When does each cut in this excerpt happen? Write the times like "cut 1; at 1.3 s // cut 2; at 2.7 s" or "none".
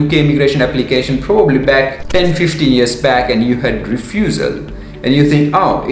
cut 1; at 2.0 s